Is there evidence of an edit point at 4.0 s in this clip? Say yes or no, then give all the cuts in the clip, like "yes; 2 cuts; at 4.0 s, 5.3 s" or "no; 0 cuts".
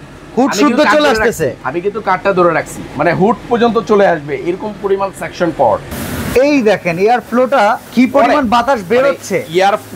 no; 3 cuts; at 1.6 s, 6.0 s, 7.9 s